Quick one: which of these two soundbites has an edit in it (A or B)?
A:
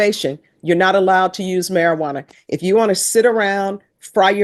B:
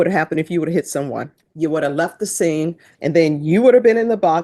B